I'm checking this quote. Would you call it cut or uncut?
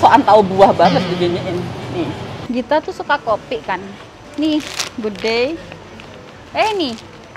cut